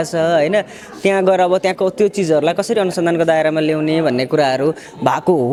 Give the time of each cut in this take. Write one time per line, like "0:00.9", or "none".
none